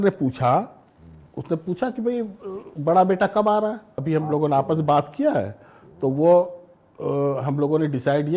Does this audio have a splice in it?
yes; 1 cut; at 4.0 s

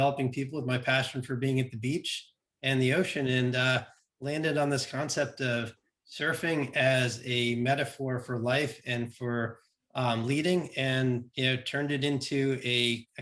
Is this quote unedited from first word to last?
yes; 0 cuts

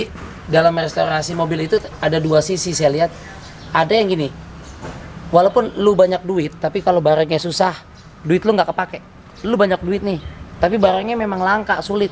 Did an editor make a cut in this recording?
no; 0 cuts

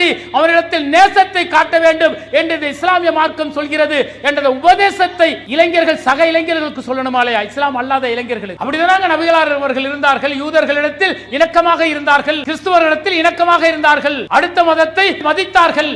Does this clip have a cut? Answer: yes; 5 cuts; at 5.4 s, 8.5 s, 12.5 s, 14.2 s, 15.2 s

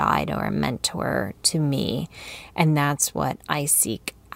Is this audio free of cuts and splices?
yes; 0 cuts

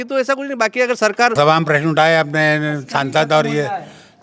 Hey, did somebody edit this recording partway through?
yes; 1 cut; at 1.3 s

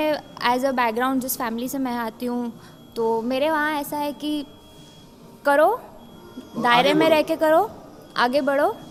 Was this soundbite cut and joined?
no; 0 cuts

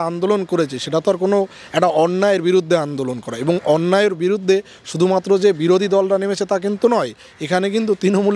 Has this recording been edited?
no; 0 cuts

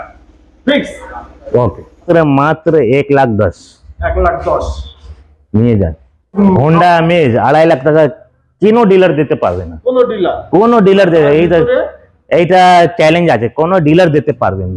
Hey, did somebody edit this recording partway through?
yes; 2 cuts; at 2.0 s, 6.3 s

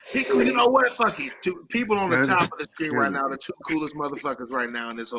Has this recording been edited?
no; 0 cuts

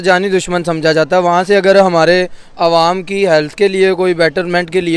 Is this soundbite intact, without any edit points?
yes; 0 cuts

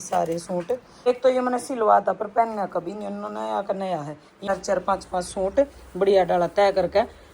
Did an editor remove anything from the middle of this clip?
yes; 2 cuts; at 1.1 s, 4.4 s

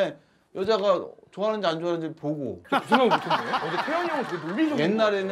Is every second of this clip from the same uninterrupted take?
yes; 0 cuts

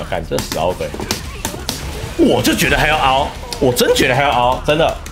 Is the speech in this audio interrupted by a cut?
yes; 1 cut; at 1.2 s

